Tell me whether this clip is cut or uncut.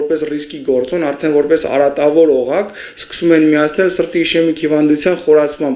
uncut